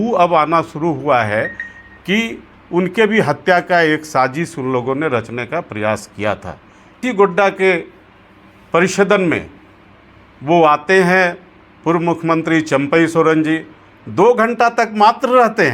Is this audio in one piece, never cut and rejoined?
no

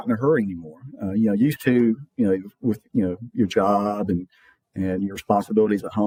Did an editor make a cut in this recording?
no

